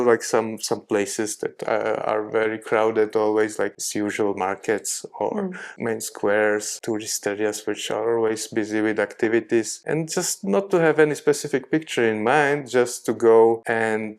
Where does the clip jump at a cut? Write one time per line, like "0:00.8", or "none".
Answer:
0:03.7
0:05.7
0:06.7
0:09.8